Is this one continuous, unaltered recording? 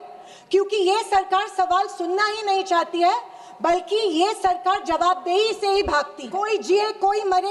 no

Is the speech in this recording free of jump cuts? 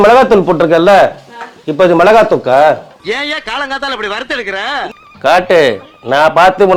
no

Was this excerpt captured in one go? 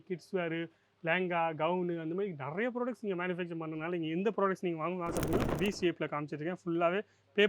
no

